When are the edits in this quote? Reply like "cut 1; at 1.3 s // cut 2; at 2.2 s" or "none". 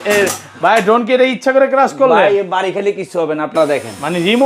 cut 1; at 3.5 s